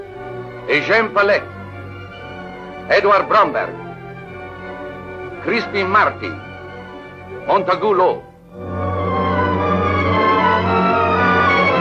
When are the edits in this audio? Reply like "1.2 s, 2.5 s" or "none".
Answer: none